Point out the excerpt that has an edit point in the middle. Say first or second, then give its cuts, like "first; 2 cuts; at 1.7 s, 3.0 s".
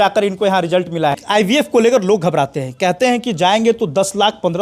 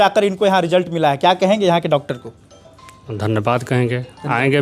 first; 1 cut; at 1.2 s